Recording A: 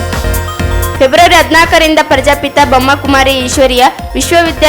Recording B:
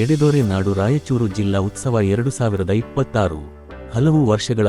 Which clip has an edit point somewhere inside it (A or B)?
A